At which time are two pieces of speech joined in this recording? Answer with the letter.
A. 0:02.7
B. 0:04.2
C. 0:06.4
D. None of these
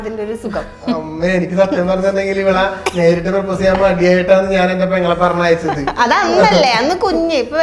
D